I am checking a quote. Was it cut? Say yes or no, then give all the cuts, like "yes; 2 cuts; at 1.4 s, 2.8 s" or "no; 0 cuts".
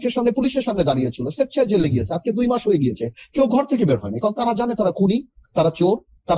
no; 0 cuts